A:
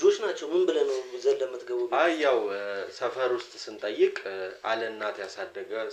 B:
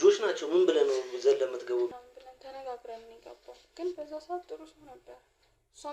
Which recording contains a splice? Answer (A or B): B